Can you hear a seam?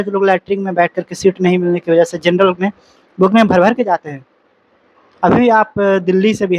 no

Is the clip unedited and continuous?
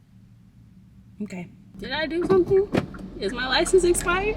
no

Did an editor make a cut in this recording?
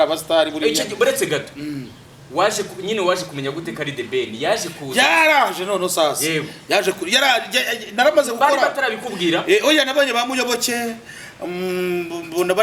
no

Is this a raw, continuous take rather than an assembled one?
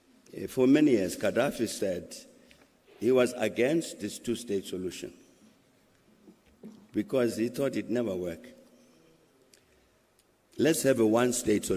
yes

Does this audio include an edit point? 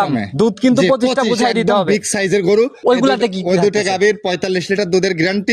yes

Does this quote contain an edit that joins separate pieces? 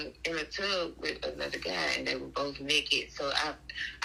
no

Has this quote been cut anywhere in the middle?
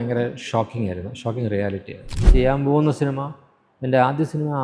yes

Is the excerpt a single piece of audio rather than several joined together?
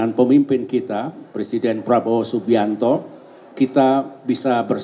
yes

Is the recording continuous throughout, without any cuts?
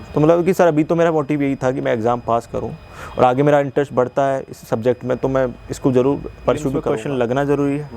no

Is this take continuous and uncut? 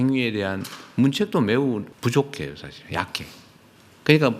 no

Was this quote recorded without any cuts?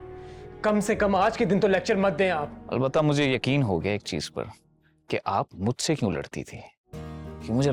no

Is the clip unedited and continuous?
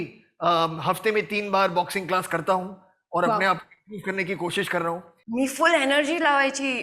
no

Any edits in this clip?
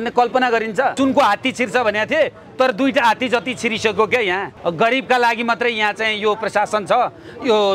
yes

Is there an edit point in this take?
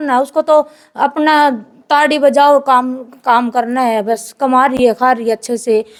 no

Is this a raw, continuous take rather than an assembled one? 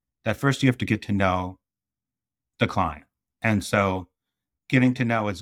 yes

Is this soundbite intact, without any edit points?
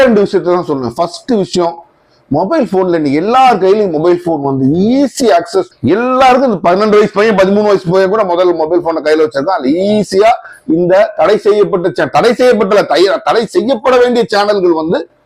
yes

